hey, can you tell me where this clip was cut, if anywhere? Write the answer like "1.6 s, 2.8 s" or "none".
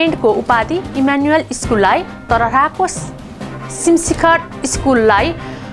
none